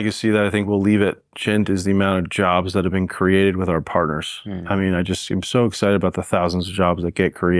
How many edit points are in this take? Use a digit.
1